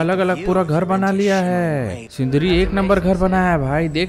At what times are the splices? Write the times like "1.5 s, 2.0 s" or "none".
2.0 s

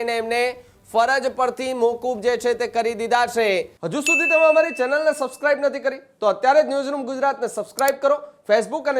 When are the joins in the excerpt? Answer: 3.8 s

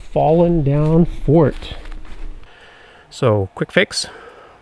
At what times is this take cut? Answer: 2.3 s

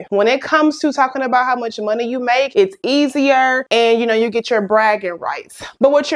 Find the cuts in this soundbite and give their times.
none

